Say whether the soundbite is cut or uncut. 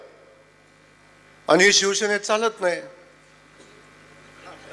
uncut